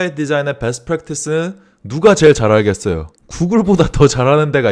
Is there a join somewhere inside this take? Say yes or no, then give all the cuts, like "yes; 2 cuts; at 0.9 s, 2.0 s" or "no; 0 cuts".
no; 0 cuts